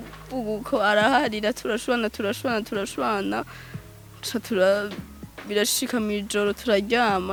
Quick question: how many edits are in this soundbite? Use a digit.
0